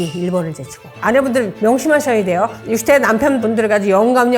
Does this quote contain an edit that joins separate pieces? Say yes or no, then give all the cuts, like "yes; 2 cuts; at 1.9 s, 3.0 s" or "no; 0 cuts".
yes; 1 cut; at 1.0 s